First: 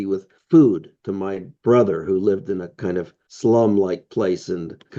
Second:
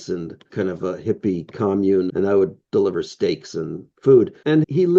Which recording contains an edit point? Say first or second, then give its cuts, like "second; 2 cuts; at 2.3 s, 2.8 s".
second; 1 cut; at 2.1 s